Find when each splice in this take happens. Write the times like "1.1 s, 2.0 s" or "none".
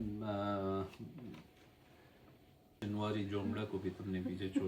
2.8 s